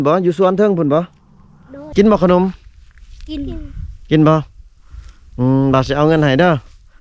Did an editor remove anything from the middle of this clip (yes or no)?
yes